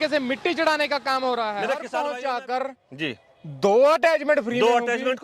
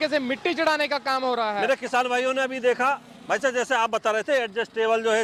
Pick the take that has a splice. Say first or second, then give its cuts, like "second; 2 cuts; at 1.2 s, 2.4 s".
first; 1 cut; at 1.9 s